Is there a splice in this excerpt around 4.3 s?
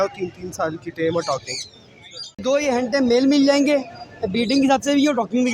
no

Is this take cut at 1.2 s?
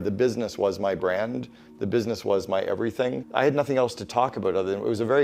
no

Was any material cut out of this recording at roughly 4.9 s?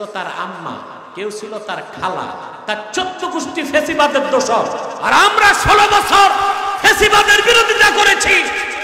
yes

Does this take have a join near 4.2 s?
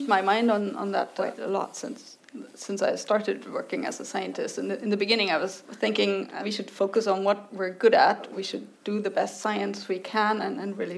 no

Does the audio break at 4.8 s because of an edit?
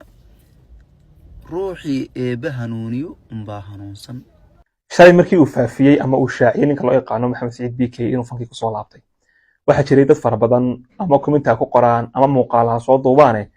yes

